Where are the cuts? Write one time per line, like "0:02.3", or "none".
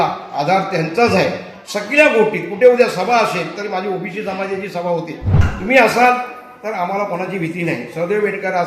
0:05.5